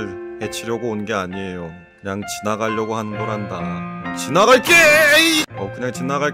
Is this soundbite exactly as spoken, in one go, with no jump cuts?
yes; 0 cuts

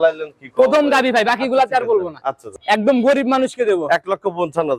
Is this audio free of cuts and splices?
no; 1 cut; at 2.4 s

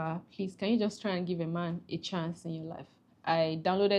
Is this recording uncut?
no; 1 cut; at 3.1 s

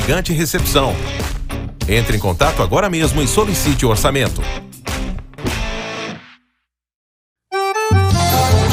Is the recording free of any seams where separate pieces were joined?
yes; 0 cuts

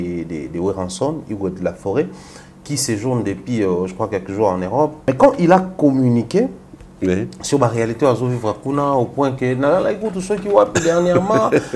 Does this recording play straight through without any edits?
no; 1 cut; at 5.0 s

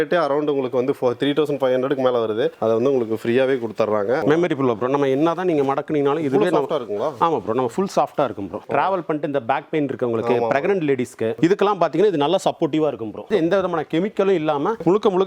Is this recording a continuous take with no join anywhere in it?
no; 3 cuts; at 4.2 s, 8.6 s, 13.3 s

